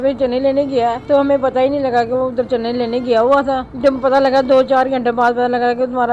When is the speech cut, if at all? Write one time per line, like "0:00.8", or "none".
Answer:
0:01.0
0:03.7